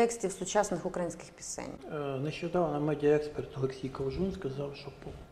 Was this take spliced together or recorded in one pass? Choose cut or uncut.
uncut